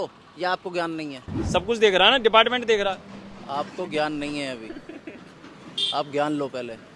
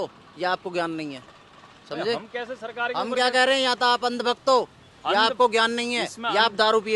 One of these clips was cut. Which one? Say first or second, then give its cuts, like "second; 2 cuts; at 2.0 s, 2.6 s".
first; 1 cut; at 1.3 s